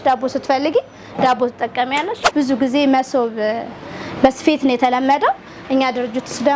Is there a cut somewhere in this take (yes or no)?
yes